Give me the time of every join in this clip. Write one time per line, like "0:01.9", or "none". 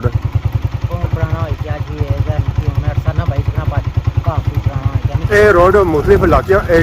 0:05.2

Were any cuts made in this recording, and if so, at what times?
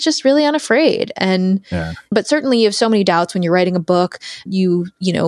0:02.1
0:04.5

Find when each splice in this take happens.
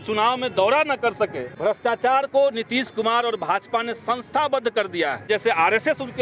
0:01.5
0:05.3

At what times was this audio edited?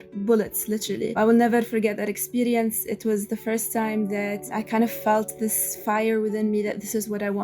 0:01.1
0:04.5

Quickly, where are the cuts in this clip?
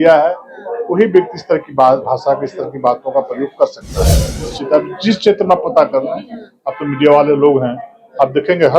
0:04.3

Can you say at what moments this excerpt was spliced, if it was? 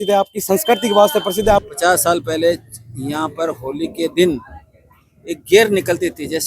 0:01.7

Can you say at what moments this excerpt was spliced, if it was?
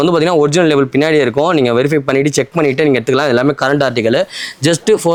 none

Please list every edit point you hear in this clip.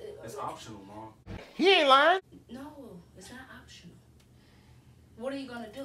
none

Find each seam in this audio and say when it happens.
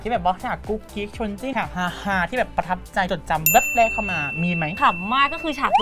0:01.5
0:03.1
0:04.7

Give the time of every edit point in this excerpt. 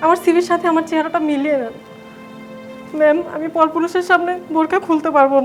none

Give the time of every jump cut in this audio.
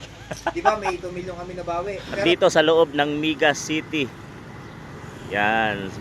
0:02.2

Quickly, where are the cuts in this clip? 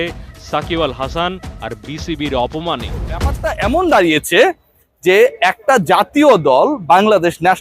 0:03.4

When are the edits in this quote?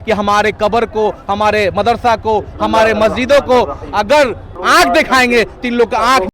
0:04.5

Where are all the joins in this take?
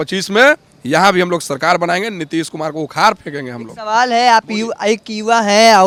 none

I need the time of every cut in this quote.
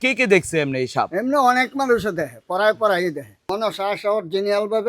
0:03.3

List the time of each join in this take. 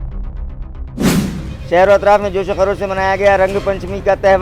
0:01.1

